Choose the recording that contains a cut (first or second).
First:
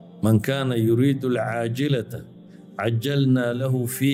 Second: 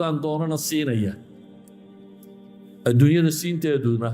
second